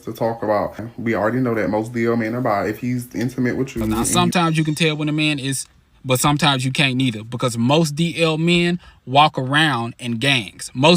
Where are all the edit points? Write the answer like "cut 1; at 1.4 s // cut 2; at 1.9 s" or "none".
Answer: cut 1; at 0.9 s // cut 2; at 4.1 s